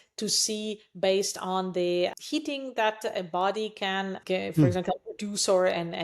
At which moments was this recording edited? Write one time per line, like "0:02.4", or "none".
0:02.2
0:04.2